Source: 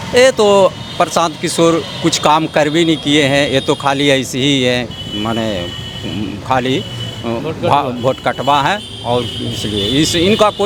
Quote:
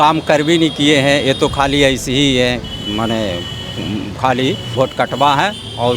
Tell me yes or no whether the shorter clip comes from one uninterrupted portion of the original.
no